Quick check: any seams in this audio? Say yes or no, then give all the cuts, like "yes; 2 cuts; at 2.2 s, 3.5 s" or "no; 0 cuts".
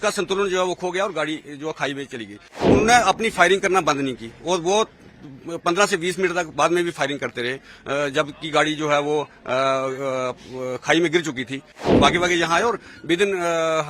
yes; 2 cuts; at 2.6 s, 11.7 s